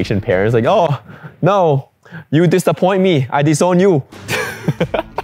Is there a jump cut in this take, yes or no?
no